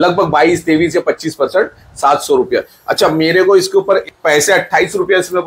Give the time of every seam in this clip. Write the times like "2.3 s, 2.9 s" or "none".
4.1 s